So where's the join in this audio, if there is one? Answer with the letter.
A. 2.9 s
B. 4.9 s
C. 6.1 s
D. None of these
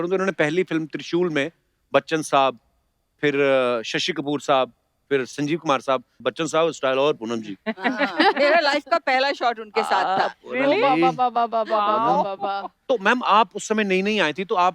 C